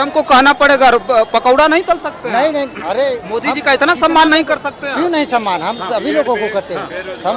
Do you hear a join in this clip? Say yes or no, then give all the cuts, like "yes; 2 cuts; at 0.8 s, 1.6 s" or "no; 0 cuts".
no; 0 cuts